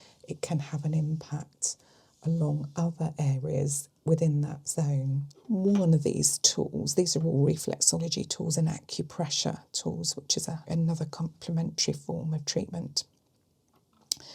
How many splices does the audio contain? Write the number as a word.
two